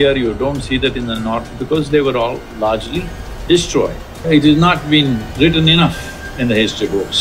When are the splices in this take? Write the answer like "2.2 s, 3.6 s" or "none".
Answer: 4.3 s, 5.3 s